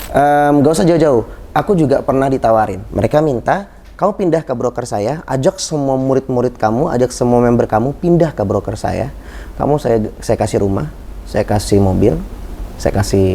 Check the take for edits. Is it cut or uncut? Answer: cut